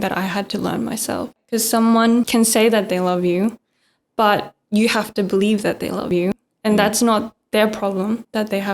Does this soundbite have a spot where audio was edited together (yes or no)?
yes